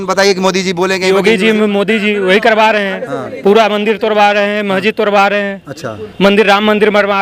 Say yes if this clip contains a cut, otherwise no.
no